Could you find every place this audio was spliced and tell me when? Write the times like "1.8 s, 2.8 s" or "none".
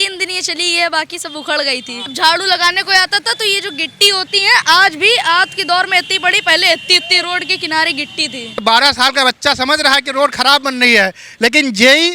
2.0 s, 8.6 s